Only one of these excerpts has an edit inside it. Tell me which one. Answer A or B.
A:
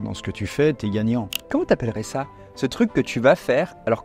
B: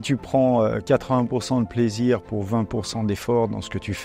A